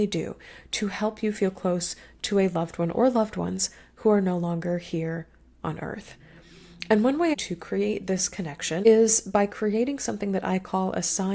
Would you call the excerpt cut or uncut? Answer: cut